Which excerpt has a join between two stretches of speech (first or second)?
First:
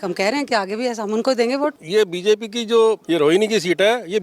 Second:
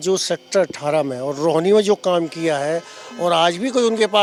first